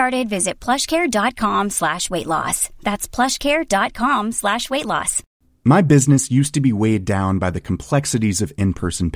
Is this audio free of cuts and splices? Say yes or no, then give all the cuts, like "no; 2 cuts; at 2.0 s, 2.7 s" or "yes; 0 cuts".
no; 1 cut; at 5.2 s